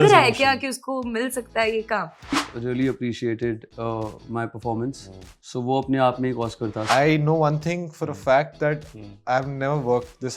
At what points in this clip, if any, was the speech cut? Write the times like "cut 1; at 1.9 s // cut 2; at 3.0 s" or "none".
cut 1; at 2.3 s // cut 2; at 6.8 s